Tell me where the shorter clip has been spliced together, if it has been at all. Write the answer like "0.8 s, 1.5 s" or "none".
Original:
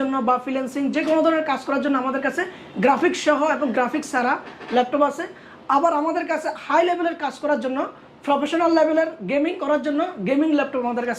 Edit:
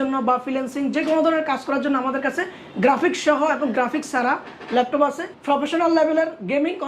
5.3 s